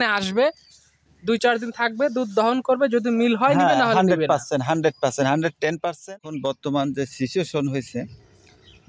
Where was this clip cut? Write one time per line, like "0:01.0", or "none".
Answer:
0:05.9